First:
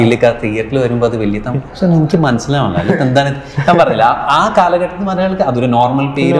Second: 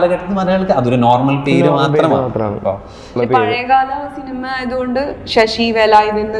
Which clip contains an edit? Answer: second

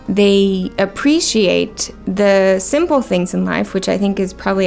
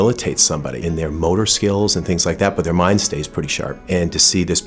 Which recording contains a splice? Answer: second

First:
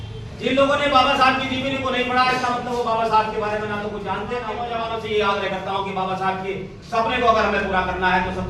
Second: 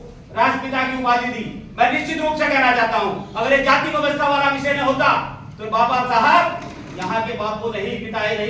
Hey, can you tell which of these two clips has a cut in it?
first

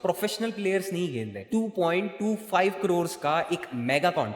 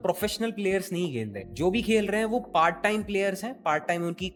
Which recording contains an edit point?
first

